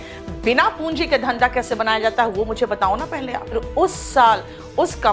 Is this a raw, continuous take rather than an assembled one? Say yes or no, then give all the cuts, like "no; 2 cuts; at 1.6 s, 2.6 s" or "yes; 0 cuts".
no; 1 cut; at 3.5 s